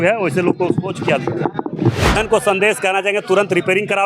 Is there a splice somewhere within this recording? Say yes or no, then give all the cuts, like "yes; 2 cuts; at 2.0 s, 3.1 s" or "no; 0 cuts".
yes; 1 cut; at 2.2 s